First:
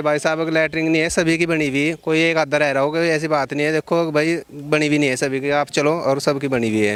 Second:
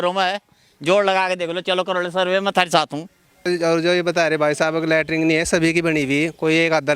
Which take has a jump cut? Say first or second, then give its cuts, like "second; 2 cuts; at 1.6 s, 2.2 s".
second; 1 cut; at 3.4 s